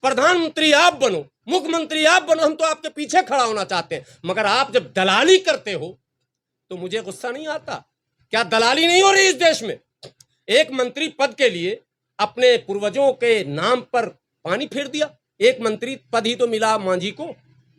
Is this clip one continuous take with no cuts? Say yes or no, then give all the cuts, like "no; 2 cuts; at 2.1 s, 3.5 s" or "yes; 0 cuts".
yes; 0 cuts